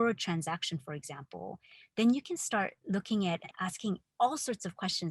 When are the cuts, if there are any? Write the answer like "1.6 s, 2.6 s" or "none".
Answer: 3.5 s

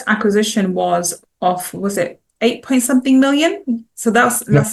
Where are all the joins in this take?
none

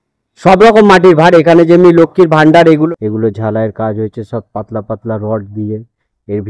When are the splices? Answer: 2.7 s

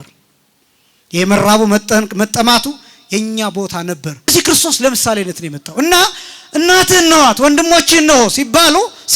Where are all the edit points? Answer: 4.3 s

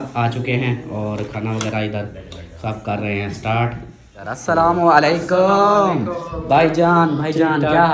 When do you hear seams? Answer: 4.4 s

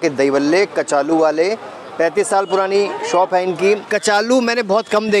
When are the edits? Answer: 3.9 s

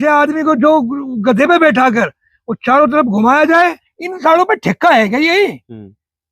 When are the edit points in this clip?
3.9 s

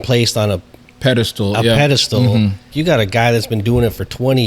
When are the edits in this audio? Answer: 2.7 s

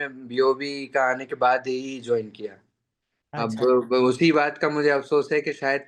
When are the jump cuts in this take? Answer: none

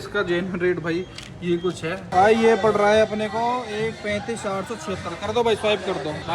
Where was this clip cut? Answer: 2.1 s

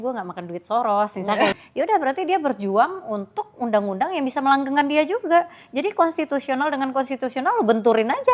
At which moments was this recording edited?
1.5 s

